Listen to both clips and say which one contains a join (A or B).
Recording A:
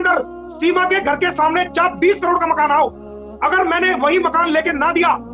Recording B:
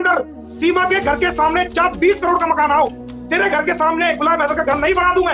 B